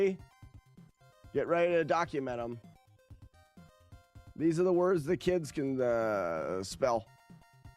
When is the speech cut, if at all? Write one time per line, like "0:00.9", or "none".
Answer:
0:06.7